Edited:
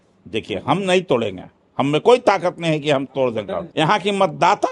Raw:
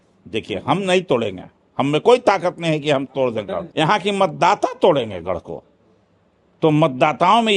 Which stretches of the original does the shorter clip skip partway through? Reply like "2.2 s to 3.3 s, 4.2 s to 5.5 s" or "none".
none